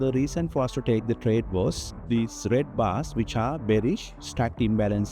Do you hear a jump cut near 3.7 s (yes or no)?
no